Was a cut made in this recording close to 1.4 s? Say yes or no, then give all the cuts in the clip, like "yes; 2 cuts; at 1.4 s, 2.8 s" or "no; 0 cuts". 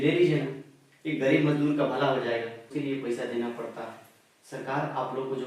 no; 1 cut; at 2.7 s